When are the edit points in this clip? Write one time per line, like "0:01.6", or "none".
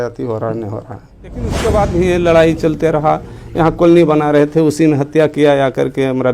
0:01.6

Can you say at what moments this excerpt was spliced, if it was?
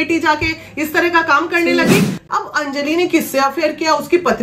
0:02.2

